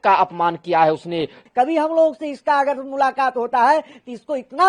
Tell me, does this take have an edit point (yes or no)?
yes